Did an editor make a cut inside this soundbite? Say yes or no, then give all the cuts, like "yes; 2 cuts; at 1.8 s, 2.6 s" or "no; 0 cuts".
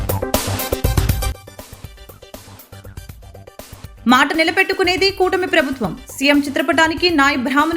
yes; 1 cut; at 3.5 s